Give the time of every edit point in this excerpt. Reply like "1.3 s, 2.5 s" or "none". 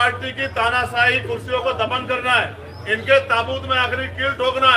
none